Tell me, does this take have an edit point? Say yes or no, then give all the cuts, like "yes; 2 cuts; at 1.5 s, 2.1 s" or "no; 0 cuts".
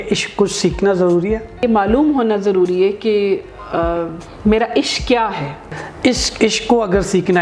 yes; 2 cuts; at 1.6 s, 5.7 s